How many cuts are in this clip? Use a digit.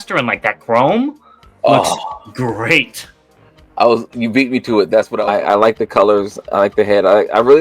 1